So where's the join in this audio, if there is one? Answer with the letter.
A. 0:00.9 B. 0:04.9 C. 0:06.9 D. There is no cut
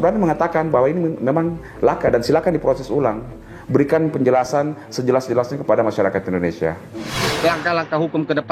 C